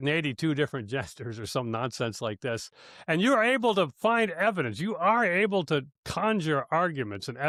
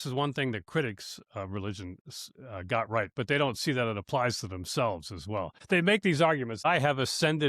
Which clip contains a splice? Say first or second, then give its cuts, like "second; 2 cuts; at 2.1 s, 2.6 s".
second; 2 cuts; at 5.6 s, 6.6 s